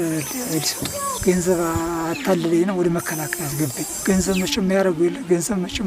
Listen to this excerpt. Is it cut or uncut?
cut